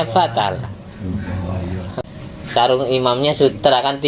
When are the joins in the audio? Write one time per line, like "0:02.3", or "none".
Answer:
0:01.9